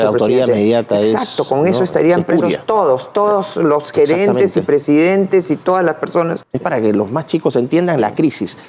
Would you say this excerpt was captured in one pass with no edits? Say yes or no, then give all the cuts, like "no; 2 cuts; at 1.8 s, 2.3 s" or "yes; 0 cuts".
no; 1 cut; at 6.4 s